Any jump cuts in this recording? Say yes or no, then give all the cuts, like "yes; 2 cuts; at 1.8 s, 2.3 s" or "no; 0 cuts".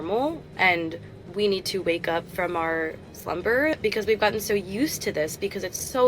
yes; 1 cut; at 3.8 s